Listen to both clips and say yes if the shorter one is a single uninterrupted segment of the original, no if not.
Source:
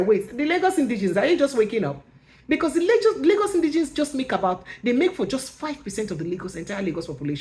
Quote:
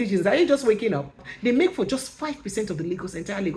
no